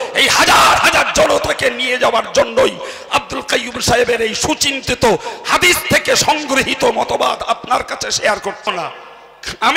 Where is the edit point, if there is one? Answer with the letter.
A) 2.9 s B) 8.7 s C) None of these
B